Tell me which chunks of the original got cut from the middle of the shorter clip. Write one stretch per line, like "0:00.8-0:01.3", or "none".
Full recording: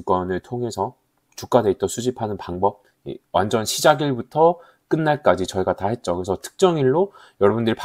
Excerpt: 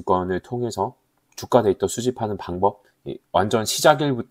none